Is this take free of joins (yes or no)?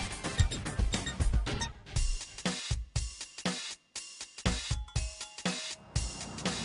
yes